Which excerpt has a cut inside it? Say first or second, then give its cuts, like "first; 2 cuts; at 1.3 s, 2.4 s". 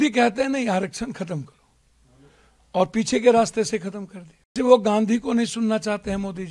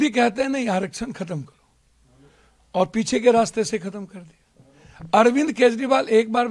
first; 1 cut; at 4.5 s